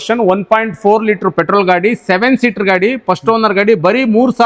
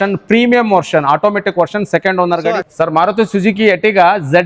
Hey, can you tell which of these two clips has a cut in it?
second; 1 cut; at 2.6 s

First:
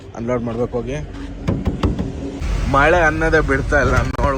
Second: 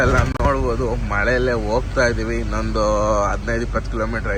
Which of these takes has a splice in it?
first; 1 cut; at 2.4 s

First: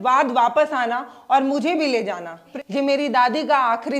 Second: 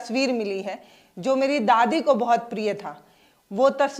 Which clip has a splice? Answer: first; 1 cut; at 2.5 s

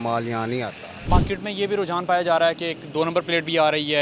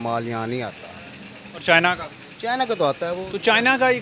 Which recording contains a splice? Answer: first; 1 cut; at 1.1 s

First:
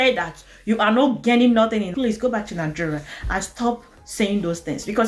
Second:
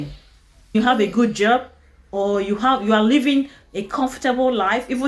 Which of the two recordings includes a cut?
first; 1 cut; at 1.9 s

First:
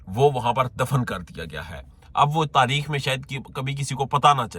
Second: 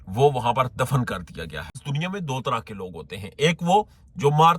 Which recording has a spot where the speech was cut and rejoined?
second; 1 cut; at 1.8 s

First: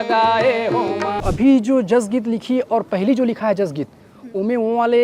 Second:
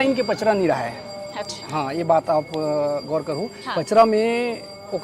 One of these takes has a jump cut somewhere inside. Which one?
first; 1 cut; at 1.2 s

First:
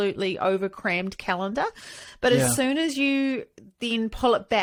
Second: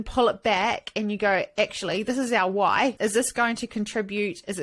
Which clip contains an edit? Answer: second; 1 cut; at 3.0 s

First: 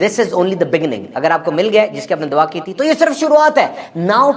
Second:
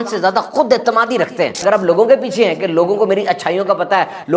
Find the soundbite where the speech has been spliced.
second; 1 cut; at 1.6 s

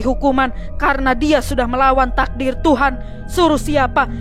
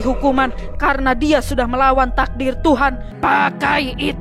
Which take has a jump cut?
second; 1 cut; at 3.1 s

